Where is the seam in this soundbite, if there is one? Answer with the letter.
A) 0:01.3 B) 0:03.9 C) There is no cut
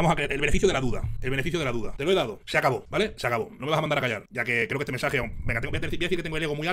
C